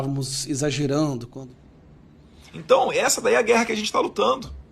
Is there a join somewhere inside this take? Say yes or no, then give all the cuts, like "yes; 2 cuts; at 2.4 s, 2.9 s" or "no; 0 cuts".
yes; 1 cut; at 1.3 s